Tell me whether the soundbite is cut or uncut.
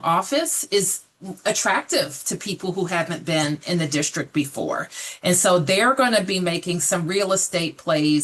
uncut